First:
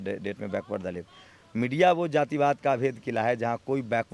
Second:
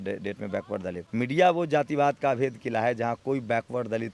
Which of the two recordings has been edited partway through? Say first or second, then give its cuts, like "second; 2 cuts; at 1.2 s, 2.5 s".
second; 1 cut; at 1.0 s